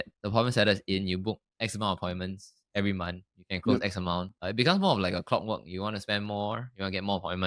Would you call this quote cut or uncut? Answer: uncut